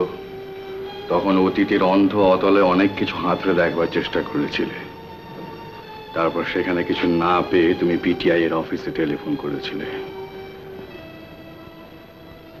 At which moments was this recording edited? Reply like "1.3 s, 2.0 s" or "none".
none